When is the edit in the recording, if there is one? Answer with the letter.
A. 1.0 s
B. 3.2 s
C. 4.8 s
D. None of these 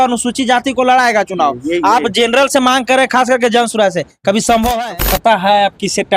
C